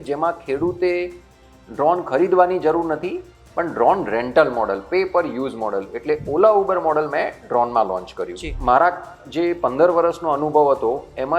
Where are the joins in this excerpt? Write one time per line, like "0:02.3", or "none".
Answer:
0:08.5